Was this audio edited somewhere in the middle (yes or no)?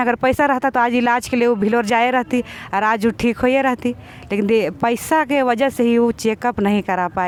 no